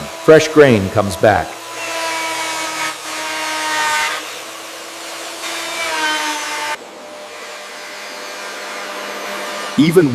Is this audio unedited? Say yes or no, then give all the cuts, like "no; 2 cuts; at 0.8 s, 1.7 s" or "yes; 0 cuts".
yes; 0 cuts